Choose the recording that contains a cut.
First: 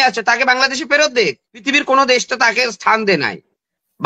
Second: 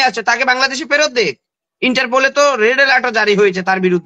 first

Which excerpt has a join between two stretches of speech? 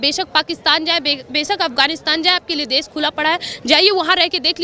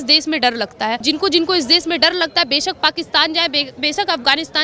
second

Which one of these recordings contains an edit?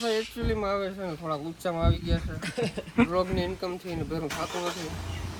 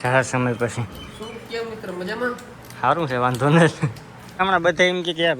second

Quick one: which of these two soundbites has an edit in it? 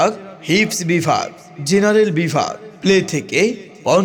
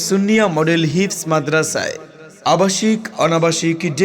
second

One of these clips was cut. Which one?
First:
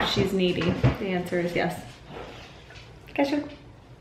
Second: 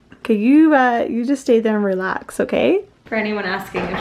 second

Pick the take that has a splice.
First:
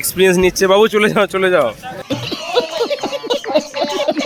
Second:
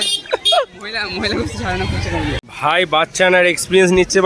second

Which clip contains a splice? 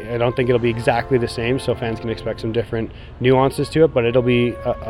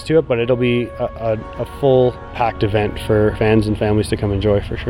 second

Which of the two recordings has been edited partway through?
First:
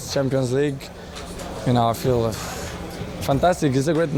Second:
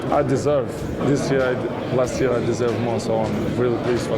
second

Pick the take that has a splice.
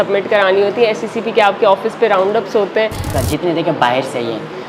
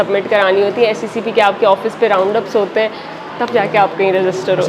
first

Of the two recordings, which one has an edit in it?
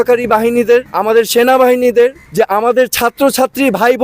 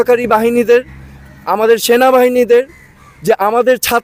first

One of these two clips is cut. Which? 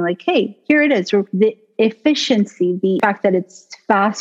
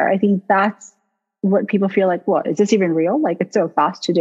first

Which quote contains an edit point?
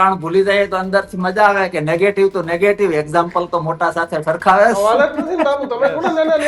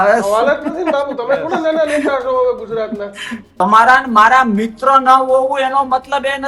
second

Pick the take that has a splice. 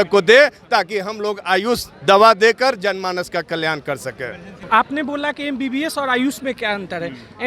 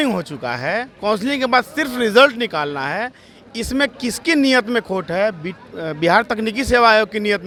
first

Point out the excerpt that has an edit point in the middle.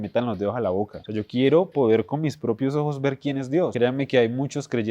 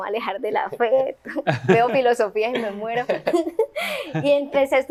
first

